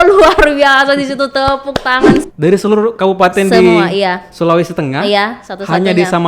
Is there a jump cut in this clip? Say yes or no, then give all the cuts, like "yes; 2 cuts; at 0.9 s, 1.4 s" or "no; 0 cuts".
yes; 1 cut; at 2.2 s